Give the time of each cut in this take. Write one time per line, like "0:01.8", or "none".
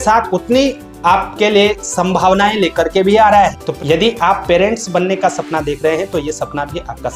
0:03.6